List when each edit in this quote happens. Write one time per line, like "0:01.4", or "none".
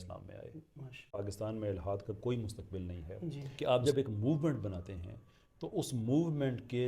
0:01.2
0:03.5